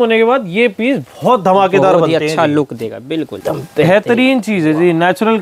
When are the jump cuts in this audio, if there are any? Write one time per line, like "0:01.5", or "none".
0:03.3